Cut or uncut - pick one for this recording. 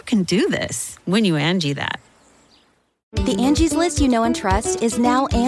cut